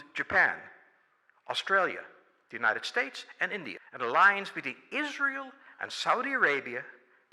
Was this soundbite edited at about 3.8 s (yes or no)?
yes